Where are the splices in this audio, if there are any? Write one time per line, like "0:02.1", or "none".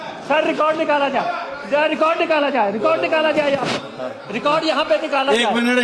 none